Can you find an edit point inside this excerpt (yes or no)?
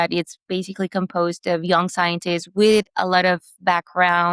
no